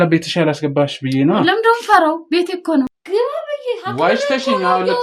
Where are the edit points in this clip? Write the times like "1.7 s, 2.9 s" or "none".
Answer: 3.0 s